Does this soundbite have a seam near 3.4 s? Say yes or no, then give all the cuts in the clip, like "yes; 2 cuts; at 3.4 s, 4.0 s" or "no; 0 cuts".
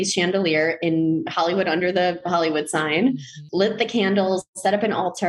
yes; 1 cut; at 3.4 s